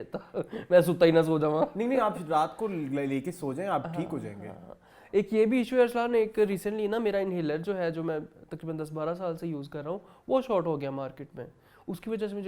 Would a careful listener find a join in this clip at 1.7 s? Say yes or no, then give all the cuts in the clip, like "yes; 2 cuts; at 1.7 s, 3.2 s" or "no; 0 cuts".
no; 0 cuts